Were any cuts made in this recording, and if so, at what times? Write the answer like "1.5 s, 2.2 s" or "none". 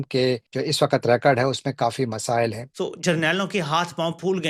2.6 s